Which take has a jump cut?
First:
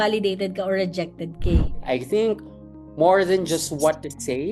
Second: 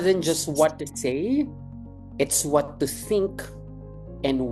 first; 1 cut; at 1.7 s

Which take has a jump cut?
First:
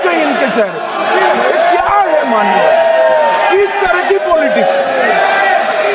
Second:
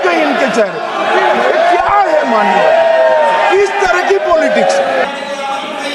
second; 1 cut; at 5.0 s

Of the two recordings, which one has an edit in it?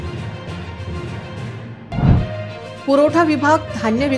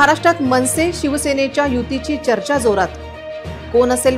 first; 1 cut; at 1.0 s

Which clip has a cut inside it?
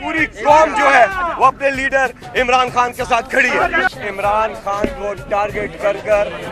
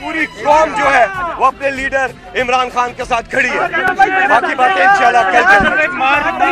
first; 1 cut; at 3.9 s

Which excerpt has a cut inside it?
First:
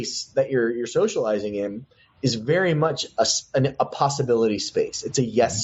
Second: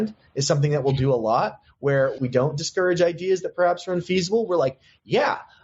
second; 1 cut; at 2.2 s

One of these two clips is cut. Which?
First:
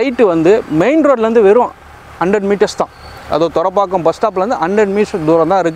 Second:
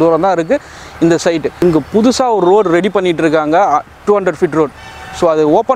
second; 1 cut; at 1.6 s

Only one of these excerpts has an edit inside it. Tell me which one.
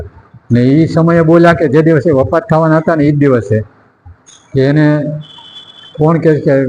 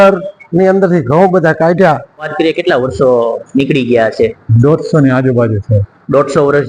second; 1 cut; at 2.3 s

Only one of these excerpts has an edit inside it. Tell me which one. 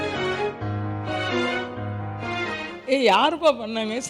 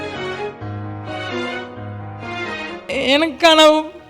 second; 1 cut; at 2.9 s

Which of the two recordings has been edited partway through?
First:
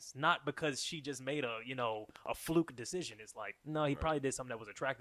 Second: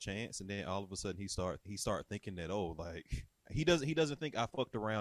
second; 2 cuts; at 1.6 s, 3.5 s

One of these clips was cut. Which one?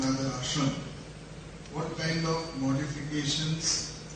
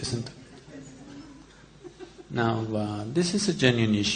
second; 1 cut; at 1.4 s

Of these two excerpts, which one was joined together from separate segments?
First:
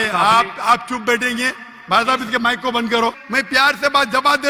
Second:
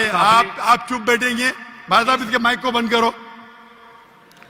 first; 1 cut; at 3.2 s

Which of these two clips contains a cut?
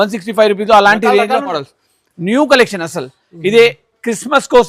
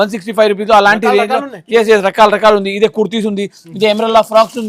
first; 1 cut; at 1.6 s

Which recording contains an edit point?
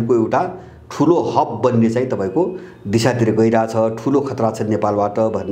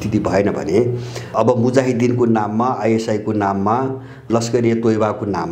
second; 2 cuts; at 1.3 s, 4.3 s

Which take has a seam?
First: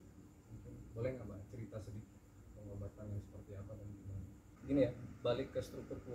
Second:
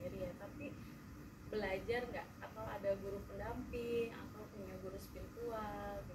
first; 1 cut; at 4.5 s

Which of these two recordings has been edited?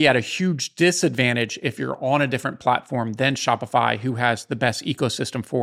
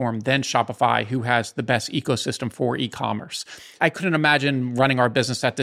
second; 1 cut; at 3.8 s

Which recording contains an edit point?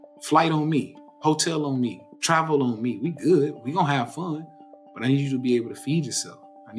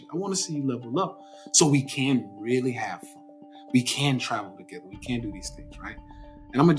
first; 1 cut; at 2.1 s

